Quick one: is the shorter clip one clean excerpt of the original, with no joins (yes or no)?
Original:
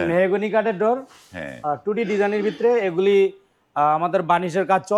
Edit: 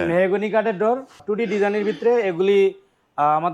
no